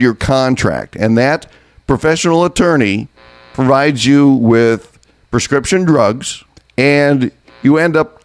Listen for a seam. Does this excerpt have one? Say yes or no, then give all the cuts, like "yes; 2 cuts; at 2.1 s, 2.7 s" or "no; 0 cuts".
no; 0 cuts